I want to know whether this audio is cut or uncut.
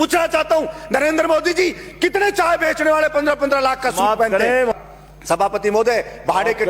cut